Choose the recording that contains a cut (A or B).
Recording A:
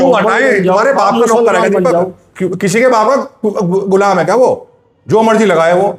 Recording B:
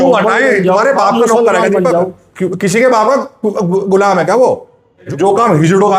B